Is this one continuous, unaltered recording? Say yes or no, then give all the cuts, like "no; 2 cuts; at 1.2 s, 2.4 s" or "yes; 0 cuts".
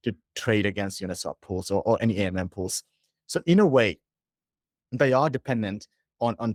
yes; 0 cuts